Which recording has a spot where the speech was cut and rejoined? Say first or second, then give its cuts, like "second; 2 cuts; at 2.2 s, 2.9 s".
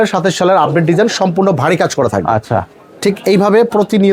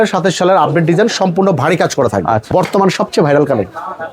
second; 1 cut; at 2.5 s